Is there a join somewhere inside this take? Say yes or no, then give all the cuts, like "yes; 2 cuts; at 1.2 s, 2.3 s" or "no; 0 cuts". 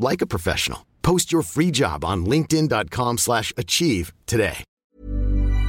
yes; 1 cut; at 4.7 s